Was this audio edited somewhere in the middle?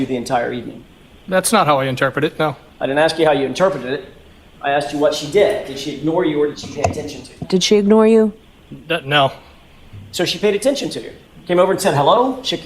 no; 0 cuts

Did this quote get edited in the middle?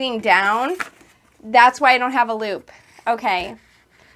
no; 0 cuts

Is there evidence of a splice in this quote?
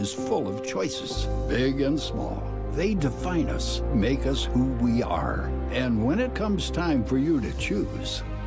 no; 0 cuts

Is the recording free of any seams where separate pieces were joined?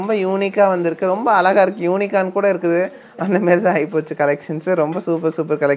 yes; 0 cuts

